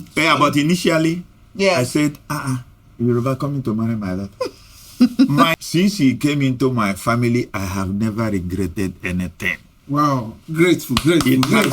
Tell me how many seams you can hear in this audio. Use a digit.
1